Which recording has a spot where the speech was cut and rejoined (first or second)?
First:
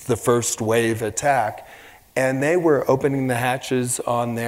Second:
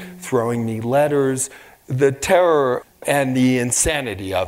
second